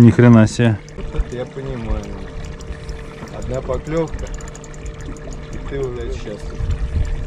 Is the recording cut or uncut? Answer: cut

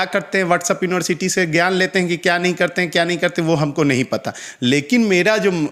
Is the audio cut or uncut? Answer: uncut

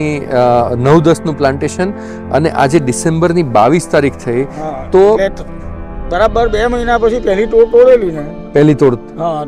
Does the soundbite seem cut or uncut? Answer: uncut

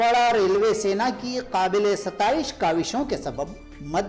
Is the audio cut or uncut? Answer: uncut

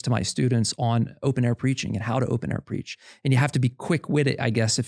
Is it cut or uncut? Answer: cut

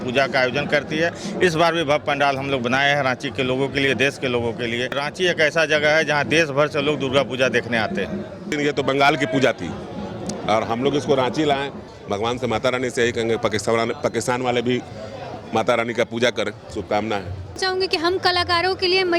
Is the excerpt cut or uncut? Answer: cut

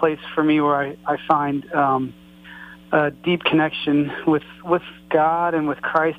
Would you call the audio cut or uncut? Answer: uncut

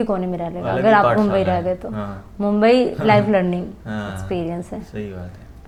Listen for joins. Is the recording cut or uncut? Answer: uncut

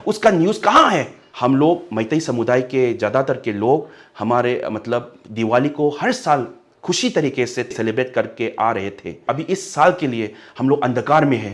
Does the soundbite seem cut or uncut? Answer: cut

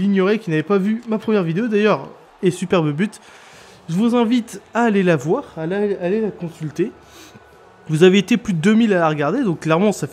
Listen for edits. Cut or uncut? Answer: cut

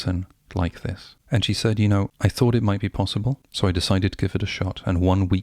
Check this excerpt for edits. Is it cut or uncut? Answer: cut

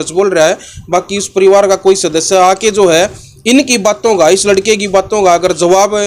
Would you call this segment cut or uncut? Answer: uncut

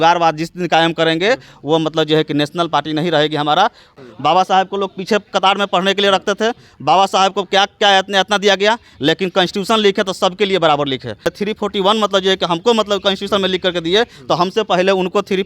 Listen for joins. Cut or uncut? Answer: cut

